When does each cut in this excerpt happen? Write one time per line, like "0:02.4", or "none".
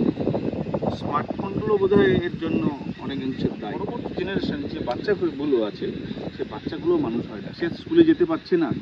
0:03.8